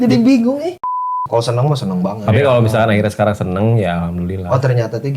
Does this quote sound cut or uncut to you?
cut